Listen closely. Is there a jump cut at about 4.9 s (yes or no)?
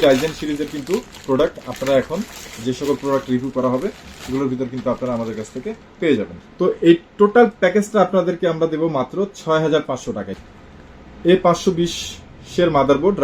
no